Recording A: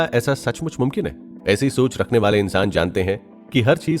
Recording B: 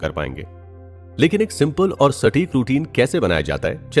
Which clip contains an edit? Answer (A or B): A